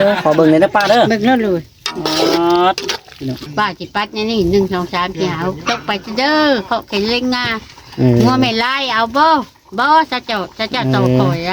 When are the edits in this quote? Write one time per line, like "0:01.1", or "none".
0:03.4